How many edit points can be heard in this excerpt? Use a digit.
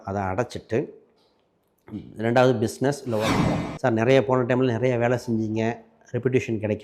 1